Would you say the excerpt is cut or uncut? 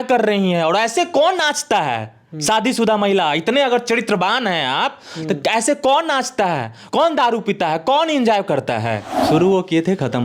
cut